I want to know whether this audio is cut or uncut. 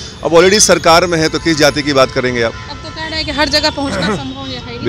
uncut